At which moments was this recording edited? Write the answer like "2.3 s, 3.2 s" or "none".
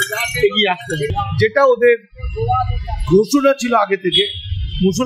1.0 s

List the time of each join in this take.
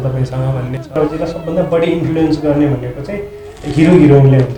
1.0 s

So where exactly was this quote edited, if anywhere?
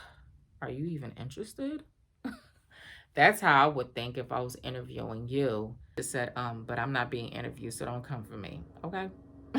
5.9 s

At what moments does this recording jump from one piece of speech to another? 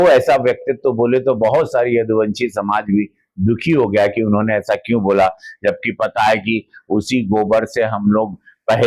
none

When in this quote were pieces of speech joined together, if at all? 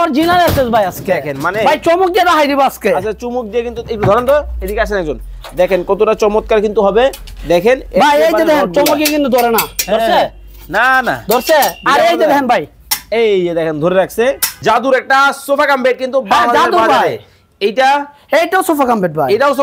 14.6 s

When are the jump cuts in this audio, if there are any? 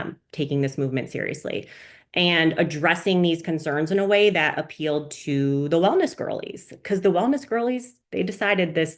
8.0 s

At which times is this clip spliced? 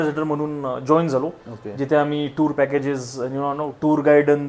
none

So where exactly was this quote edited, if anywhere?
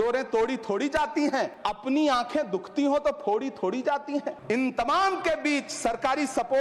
4.4 s

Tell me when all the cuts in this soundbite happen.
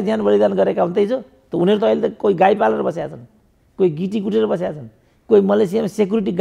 none

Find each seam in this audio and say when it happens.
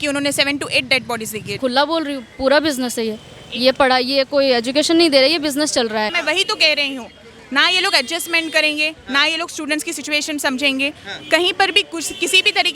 1.5 s, 6.2 s

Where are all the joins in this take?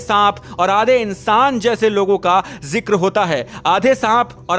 none

